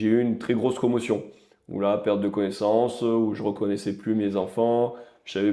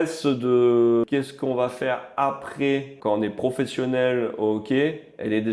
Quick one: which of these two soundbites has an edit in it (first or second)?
second